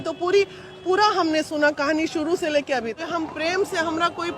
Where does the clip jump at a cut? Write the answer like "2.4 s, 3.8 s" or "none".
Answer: 3.0 s